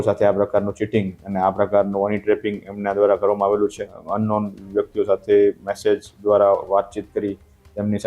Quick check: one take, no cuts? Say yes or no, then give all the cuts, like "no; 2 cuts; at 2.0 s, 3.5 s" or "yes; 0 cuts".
no; 1 cut; at 4.0 s